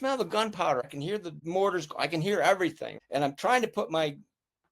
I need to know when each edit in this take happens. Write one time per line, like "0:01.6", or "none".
0:01.0
0:02.9